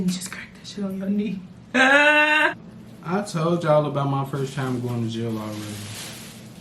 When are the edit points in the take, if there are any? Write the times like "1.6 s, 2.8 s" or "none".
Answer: 2.6 s